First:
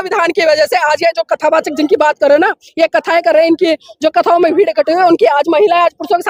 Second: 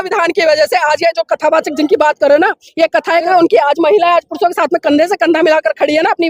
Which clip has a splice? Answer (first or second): second